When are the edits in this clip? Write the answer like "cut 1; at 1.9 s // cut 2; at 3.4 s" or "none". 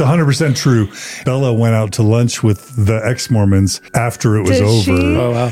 cut 1; at 1.2 s // cut 2; at 3.8 s